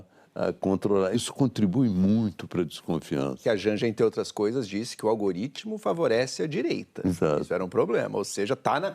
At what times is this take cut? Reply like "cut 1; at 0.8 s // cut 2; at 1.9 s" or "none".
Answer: cut 1; at 1.2 s // cut 2; at 3.4 s